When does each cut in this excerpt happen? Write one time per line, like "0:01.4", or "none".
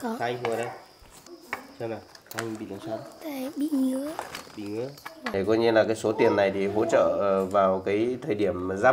0:01.2
0:05.2